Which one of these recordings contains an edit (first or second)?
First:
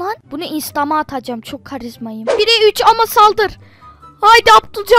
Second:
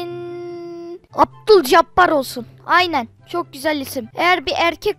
first